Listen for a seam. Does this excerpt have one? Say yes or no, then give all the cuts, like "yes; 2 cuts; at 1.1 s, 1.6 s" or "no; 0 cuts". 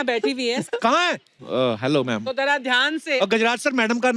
yes; 2 cuts; at 1.1 s, 3.2 s